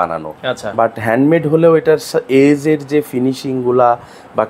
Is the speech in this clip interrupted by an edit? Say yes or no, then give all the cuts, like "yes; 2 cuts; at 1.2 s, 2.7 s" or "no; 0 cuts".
no; 0 cuts